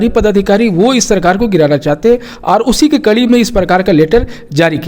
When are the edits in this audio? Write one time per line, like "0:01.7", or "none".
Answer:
none